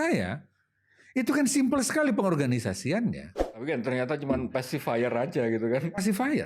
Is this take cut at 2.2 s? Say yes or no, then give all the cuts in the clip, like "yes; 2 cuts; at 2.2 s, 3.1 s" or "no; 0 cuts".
no; 1 cut; at 3.6 s